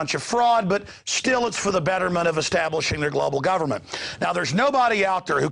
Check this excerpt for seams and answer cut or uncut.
cut